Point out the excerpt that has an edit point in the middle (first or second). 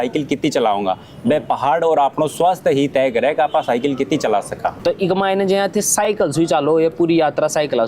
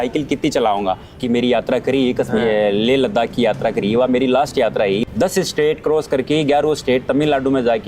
second